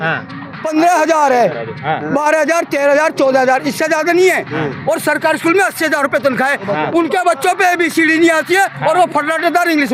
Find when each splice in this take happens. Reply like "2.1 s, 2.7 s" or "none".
none